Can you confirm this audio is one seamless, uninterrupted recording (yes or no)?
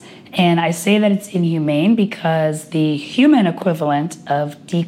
yes